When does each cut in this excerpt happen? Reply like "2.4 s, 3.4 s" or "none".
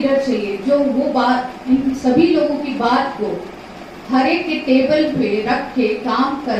none